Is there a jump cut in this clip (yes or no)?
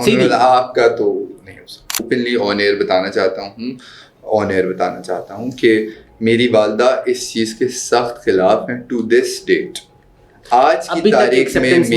yes